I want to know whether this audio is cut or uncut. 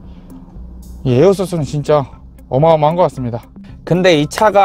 cut